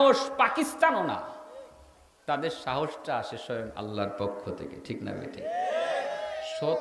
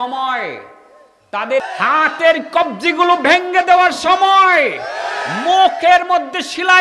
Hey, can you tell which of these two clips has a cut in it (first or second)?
second